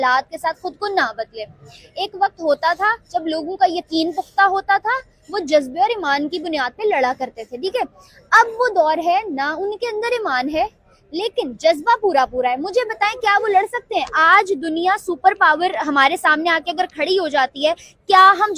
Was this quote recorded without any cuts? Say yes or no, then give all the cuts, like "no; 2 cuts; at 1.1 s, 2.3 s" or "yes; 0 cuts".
yes; 0 cuts